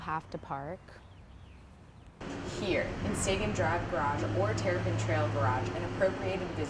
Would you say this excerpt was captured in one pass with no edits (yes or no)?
yes